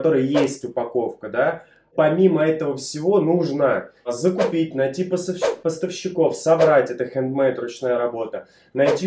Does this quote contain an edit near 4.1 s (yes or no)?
yes